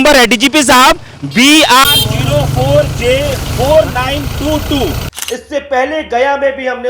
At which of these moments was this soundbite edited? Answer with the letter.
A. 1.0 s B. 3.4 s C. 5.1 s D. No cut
C